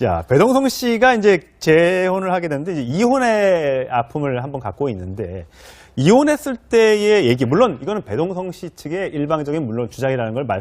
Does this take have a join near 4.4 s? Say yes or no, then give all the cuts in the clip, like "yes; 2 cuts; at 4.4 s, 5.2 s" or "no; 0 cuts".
yes; 1 cut; at 4.4 s